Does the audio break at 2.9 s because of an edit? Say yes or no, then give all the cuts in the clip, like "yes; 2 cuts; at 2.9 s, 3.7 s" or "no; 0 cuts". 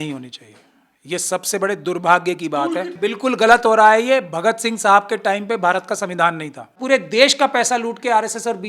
yes; 2 cuts; at 2.9 s, 6.8 s